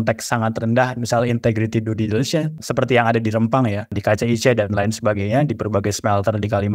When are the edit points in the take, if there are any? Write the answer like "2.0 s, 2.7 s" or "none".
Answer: 2.6 s, 4.0 s